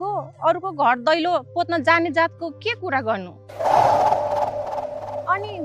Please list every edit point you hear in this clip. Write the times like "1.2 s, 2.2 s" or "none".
none